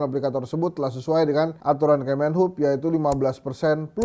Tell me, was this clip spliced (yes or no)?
no